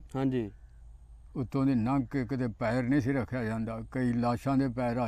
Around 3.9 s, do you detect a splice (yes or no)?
yes